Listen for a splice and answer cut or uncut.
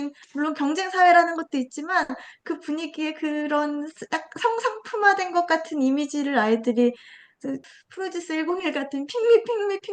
cut